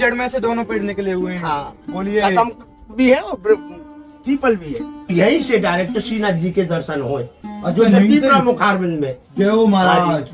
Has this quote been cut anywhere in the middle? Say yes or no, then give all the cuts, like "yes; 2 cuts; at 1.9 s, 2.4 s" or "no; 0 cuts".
yes; 1 cut; at 5.1 s